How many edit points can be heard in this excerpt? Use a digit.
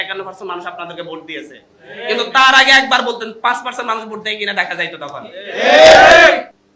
0